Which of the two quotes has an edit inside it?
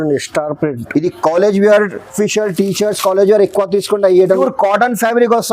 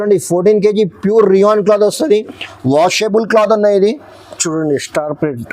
first; 2 cuts; at 2.0 s, 4.3 s

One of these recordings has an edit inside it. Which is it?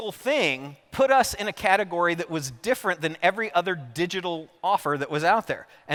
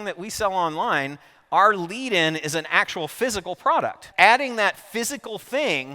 second; 1 cut; at 4.0 s

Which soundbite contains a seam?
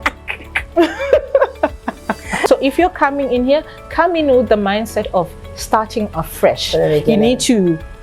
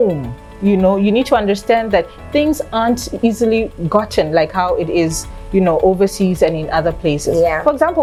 first; 1 cut; at 2.4 s

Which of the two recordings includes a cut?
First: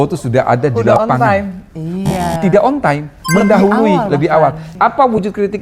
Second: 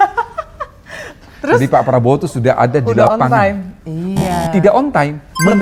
first; 1 cut; at 4.6 s

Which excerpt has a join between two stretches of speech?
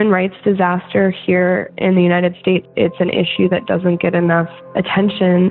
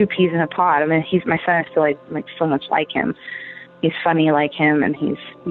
first; 2 cuts; at 2.7 s, 4.6 s

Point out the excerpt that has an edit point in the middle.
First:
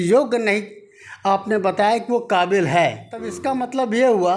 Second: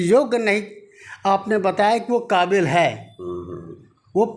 first; 1 cut; at 3.3 s

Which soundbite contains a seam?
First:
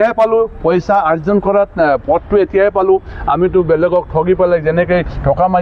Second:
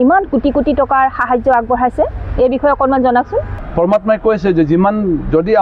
second; 1 cut; at 3.6 s

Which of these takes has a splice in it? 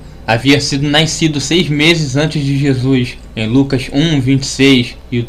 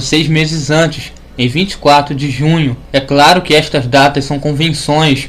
second; 1 cut; at 2.6 s

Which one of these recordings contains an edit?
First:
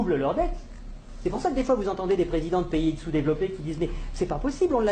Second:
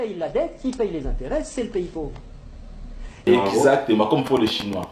second; 1 cut; at 3.2 s

